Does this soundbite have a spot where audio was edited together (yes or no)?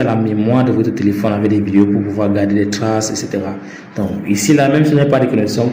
no